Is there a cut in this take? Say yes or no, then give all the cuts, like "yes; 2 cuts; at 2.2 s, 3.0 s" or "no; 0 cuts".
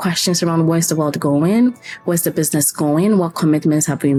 no; 0 cuts